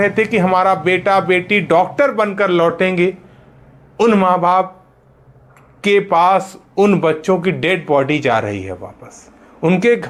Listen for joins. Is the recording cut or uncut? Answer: uncut